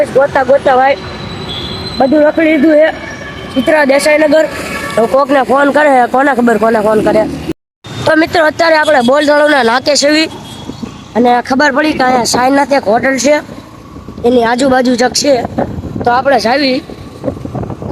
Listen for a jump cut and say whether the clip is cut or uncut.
cut